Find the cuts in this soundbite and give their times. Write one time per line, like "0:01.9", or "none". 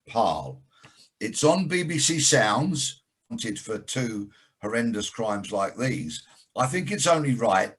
0:03.3